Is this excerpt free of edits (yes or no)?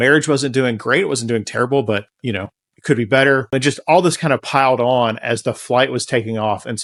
yes